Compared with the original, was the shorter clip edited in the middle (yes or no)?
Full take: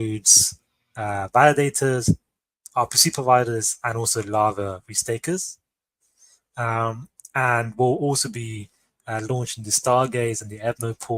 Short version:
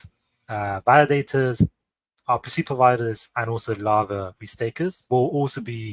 yes